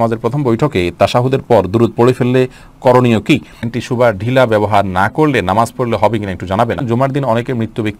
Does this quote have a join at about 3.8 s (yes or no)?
yes